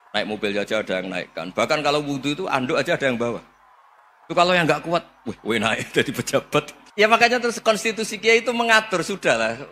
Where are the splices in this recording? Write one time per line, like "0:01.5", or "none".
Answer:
0:06.8